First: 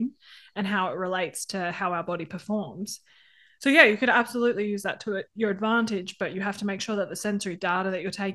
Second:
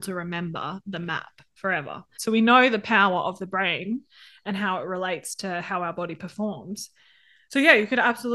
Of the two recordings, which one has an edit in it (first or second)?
second